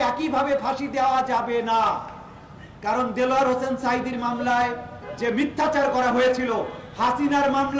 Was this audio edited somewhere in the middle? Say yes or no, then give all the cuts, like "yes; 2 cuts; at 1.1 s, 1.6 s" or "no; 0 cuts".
no; 0 cuts